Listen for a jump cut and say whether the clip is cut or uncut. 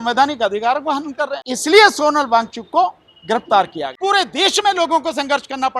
cut